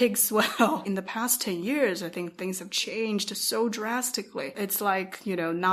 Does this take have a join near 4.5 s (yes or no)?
yes